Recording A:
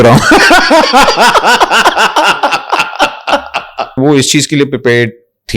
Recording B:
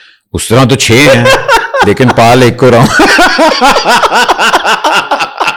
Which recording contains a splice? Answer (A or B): A